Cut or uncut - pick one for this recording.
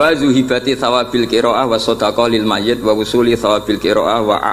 uncut